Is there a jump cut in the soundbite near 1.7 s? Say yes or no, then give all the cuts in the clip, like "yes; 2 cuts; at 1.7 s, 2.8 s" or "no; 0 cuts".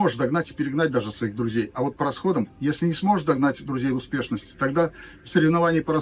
no; 0 cuts